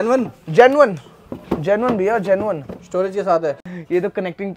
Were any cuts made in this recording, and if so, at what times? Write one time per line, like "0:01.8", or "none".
0:03.6

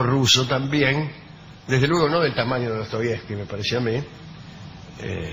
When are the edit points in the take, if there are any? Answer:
0:02.5

